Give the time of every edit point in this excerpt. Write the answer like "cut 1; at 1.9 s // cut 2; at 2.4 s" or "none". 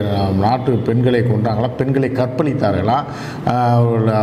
none